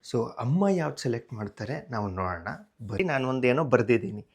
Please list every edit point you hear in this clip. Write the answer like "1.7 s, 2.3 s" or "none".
3.0 s